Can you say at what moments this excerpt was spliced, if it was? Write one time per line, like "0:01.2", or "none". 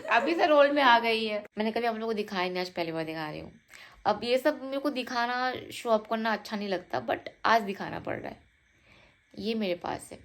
0:01.5